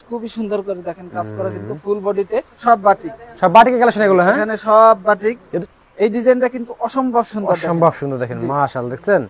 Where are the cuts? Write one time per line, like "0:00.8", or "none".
0:02.5
0:05.5